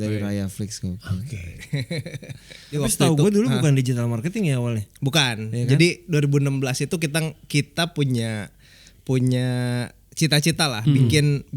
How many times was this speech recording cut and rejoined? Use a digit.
1